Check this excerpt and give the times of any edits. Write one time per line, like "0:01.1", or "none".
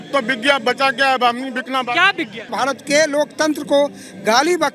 0:02.5